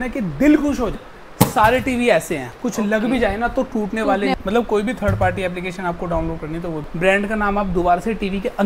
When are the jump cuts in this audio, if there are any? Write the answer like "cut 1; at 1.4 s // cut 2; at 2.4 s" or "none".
cut 1; at 1.0 s // cut 2; at 4.3 s // cut 3; at 6.8 s